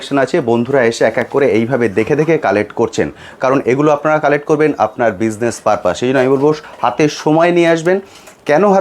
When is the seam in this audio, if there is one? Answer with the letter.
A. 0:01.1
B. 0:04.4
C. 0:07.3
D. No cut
D